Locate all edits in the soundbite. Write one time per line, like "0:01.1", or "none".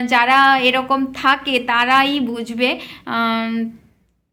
none